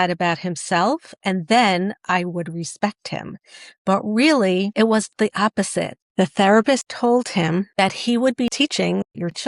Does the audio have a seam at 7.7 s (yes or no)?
yes